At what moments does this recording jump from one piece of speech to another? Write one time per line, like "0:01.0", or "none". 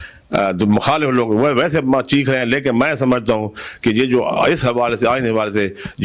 none